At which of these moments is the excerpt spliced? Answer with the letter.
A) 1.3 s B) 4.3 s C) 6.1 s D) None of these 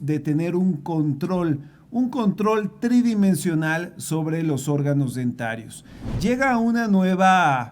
C